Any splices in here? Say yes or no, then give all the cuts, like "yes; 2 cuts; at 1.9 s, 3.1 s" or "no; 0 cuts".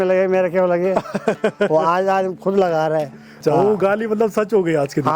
yes; 1 cut; at 3.4 s